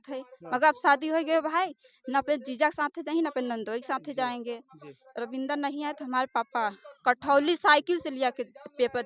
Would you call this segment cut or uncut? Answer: uncut